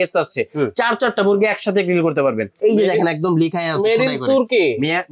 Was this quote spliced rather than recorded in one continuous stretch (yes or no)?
yes